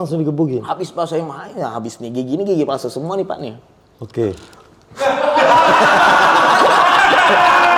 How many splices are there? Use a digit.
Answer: 0